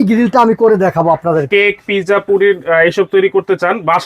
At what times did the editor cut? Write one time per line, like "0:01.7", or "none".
0:01.5